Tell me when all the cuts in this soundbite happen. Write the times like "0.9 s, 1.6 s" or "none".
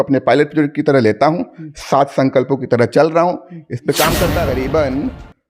4.5 s